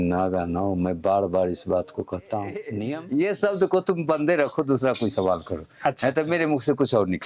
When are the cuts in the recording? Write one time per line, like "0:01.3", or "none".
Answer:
0:02.8